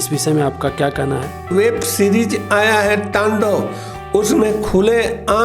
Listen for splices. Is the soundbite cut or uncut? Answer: cut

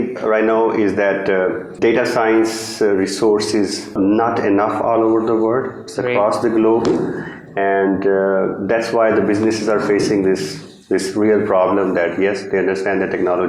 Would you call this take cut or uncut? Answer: cut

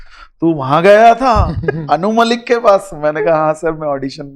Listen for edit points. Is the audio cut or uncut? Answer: uncut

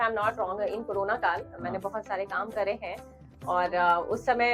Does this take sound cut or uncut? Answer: uncut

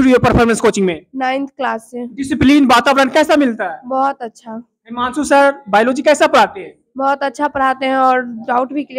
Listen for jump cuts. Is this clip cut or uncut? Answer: uncut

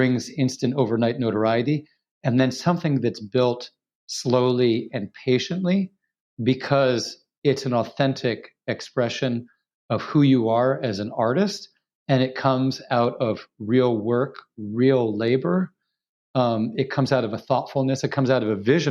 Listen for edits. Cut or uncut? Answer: uncut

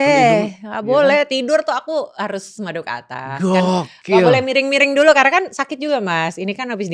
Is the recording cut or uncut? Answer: uncut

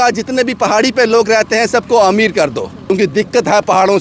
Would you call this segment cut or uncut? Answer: cut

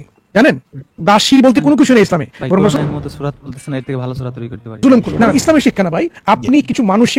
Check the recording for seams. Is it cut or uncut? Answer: cut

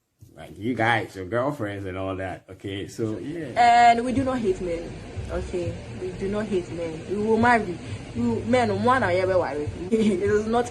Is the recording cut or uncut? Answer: cut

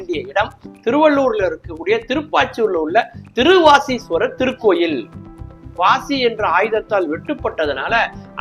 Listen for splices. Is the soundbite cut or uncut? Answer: cut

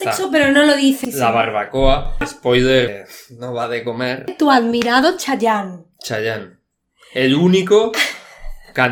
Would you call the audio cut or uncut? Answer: cut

